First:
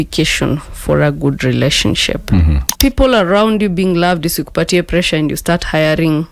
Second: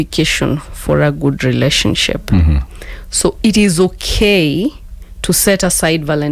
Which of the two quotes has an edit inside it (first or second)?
first